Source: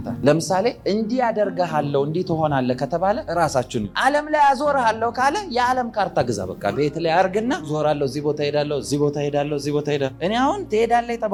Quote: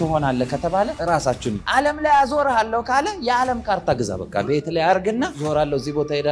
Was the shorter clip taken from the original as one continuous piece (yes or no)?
yes